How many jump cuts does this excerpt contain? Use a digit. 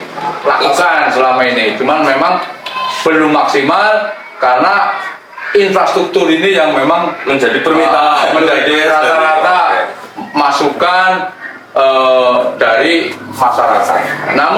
0